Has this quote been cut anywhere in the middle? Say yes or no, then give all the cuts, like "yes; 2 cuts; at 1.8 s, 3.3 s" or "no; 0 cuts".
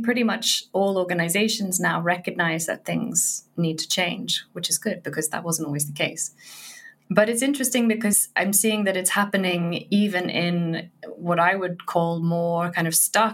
yes; 1 cut; at 8.3 s